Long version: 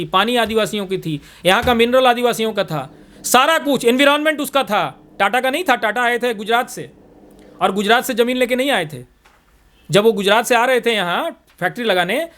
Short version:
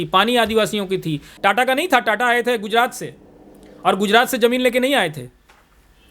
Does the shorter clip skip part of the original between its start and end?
yes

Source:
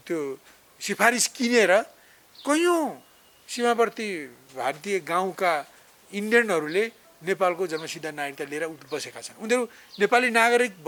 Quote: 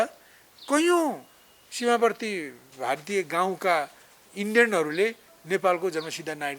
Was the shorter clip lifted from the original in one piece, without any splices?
yes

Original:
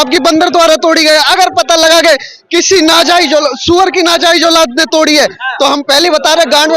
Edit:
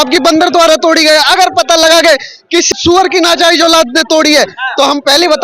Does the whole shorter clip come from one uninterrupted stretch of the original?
no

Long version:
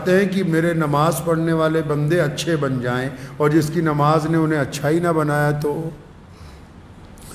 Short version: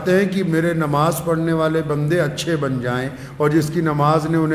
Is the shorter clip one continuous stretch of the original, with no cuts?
yes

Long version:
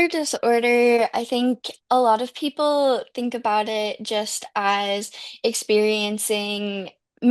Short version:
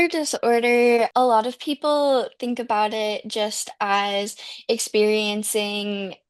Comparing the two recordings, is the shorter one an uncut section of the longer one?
no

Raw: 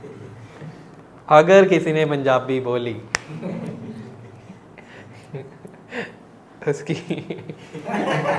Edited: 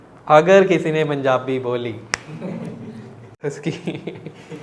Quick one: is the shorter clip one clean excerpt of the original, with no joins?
no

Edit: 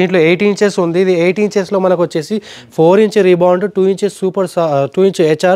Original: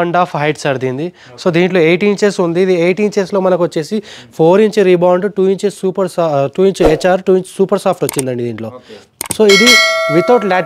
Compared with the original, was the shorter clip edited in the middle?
no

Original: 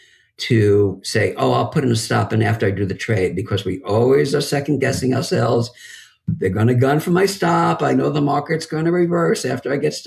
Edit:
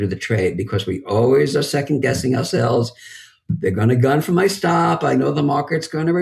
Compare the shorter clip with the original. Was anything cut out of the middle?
no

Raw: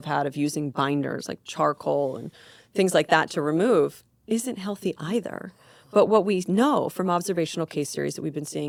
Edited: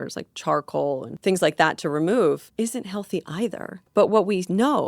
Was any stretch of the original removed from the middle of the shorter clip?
yes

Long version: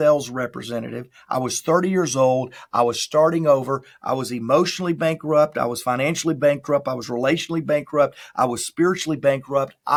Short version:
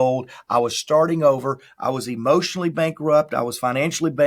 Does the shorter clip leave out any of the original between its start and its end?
no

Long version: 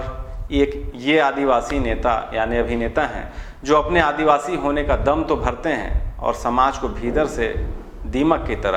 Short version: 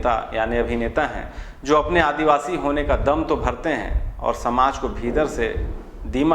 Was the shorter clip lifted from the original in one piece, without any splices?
yes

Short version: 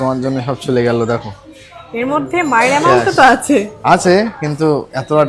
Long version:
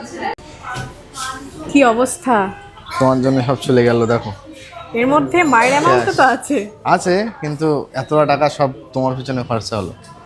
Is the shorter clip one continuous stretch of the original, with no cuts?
yes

